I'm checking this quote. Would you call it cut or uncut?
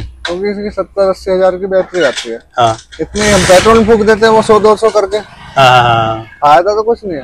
uncut